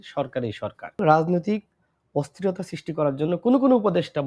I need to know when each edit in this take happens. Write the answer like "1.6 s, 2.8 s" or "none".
1.0 s